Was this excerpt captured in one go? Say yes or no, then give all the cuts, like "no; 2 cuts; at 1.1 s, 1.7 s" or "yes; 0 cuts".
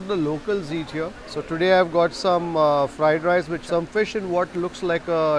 no; 1 cut; at 3.6 s